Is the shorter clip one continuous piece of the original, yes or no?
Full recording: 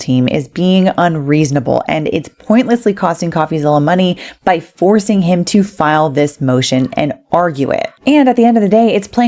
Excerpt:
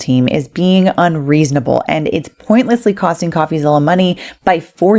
yes